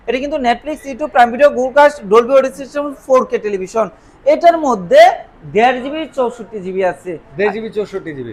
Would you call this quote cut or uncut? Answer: uncut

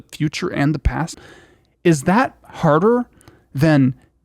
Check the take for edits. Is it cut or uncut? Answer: cut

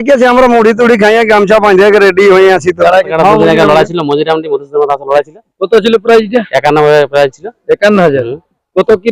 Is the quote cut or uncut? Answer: cut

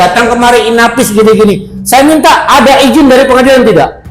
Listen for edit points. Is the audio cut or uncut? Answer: uncut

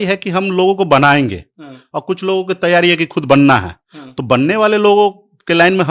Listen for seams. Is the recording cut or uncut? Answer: uncut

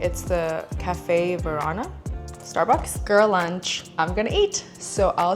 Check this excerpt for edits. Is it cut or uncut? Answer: cut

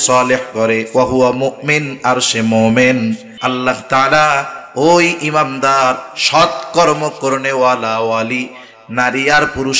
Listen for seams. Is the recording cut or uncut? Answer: cut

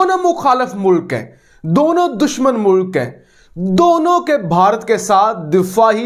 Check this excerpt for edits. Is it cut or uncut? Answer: uncut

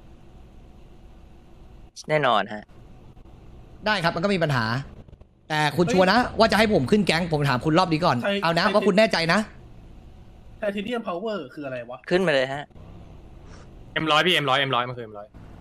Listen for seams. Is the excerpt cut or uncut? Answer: uncut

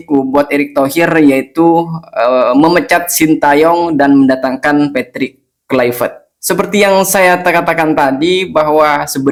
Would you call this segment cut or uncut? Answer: uncut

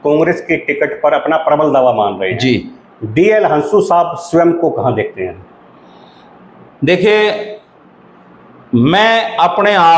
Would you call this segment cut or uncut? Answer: uncut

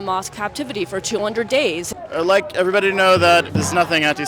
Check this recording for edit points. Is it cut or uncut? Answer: cut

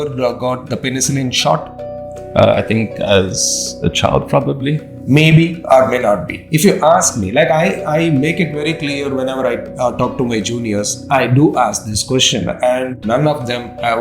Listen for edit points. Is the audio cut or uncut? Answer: cut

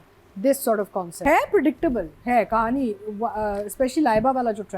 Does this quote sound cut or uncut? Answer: cut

